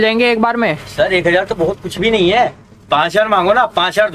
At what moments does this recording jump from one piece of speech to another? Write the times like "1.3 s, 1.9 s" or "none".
none